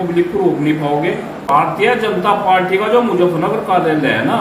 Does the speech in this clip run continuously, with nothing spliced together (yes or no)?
no